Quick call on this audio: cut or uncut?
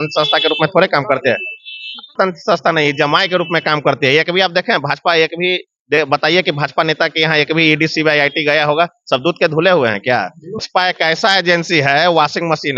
cut